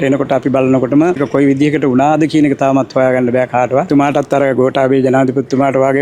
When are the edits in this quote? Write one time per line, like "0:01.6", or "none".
0:01.2
0:03.9